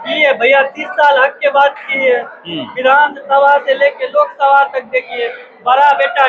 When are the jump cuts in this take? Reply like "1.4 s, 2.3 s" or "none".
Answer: none

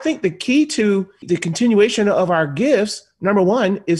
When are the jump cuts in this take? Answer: 1.2 s

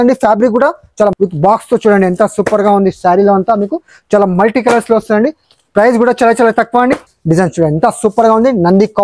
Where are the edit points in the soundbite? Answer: 1.1 s, 7.1 s

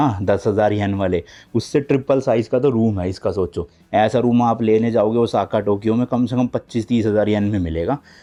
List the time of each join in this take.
none

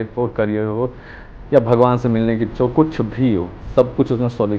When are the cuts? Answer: none

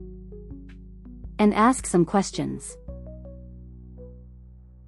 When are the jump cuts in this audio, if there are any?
1.4 s, 2.6 s

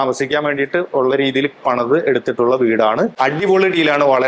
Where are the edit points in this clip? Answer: 3.1 s

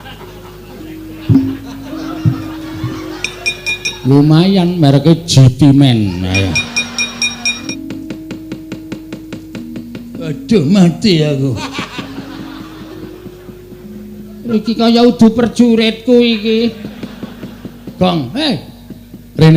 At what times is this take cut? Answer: 7.6 s

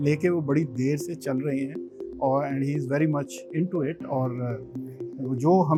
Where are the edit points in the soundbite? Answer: none

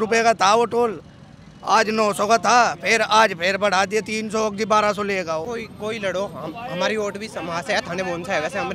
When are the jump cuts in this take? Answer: 5.5 s

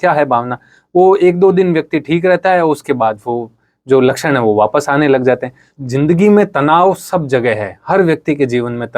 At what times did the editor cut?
5.7 s

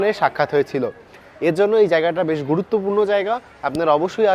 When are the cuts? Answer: none

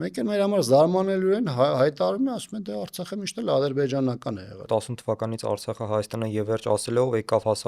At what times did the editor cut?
4.6 s

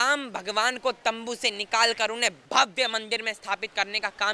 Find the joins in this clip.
2.4 s

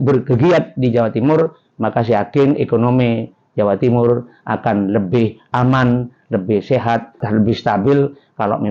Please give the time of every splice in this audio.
7.2 s

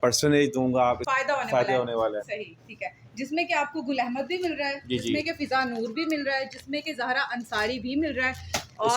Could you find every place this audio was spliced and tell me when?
1.0 s

